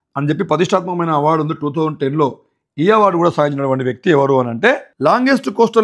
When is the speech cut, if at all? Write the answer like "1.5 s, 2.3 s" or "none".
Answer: 4.9 s